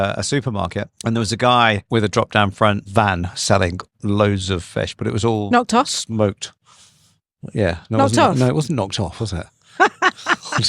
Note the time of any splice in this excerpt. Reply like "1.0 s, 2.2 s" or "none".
0.9 s, 1.8 s, 2.8 s